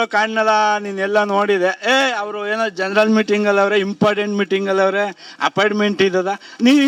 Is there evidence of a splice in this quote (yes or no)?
no